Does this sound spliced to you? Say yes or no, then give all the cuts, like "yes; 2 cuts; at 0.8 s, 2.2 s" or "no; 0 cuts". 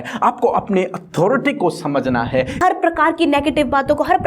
yes; 1 cut; at 2.6 s